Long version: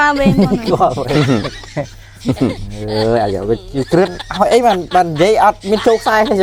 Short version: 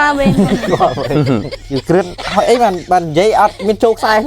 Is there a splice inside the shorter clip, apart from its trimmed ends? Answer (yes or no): yes